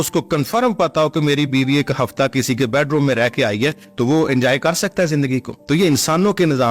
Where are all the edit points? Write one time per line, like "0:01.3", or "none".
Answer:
0:05.5